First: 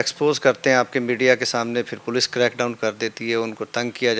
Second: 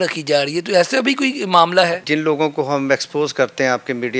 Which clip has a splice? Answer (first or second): second